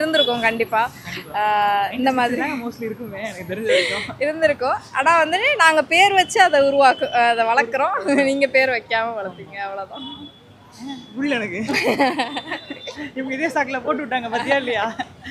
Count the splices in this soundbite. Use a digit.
0